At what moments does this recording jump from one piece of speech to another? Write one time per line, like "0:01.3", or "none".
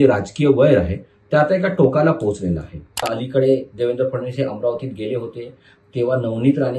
0:03.1